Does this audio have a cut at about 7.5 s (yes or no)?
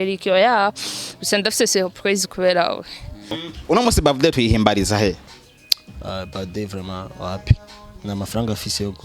no